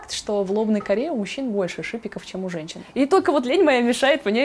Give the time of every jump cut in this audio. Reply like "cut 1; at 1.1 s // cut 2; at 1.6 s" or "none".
cut 1; at 2.8 s